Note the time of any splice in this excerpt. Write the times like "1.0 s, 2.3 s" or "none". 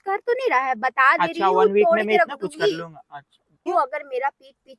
none